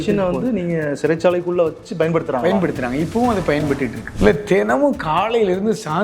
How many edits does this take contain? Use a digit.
1